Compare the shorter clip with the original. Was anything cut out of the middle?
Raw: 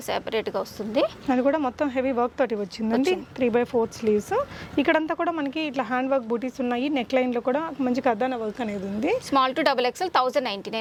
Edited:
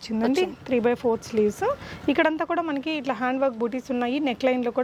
no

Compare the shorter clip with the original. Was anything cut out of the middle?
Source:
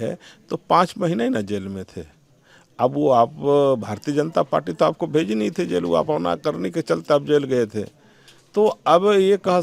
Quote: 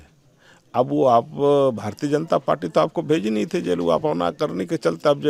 no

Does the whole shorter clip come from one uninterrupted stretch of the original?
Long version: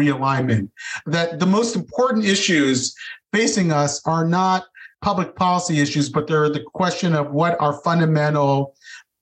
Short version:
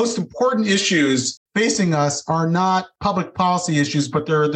no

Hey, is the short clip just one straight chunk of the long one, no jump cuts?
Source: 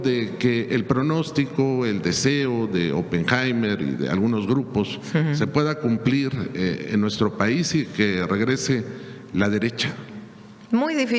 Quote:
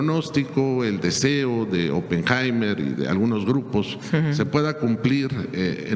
yes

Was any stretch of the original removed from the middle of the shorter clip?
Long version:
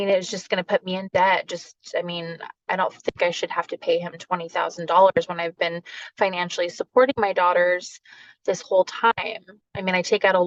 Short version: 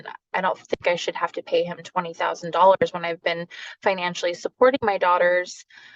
no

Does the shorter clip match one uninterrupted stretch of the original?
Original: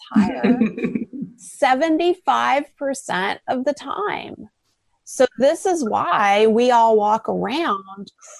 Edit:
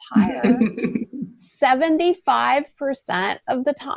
yes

